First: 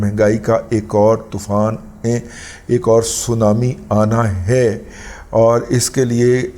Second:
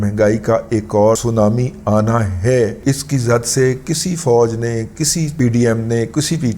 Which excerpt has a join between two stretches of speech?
second; 2 cuts; at 1.2 s, 2.8 s

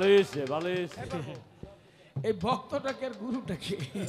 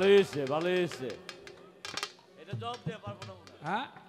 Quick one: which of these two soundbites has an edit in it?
first; 1 cut; at 0.9 s

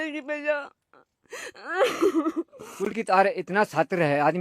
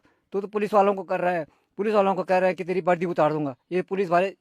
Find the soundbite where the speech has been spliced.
first; 1 cut; at 3.0 s

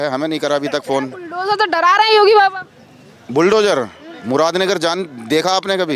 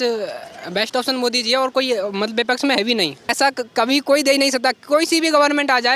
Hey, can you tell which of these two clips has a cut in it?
second; 1 cut; at 3.2 s

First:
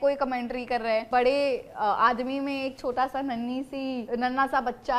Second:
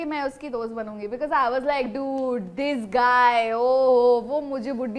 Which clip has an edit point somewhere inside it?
first; 2 cuts; at 1.1 s, 4.0 s

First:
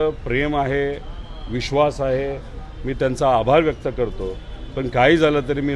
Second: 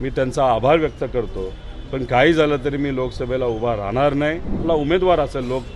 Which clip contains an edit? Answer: second; 1 cut; at 4.6 s

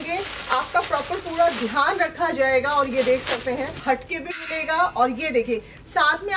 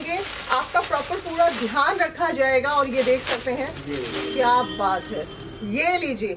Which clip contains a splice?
first; 1 cut; at 3.8 s

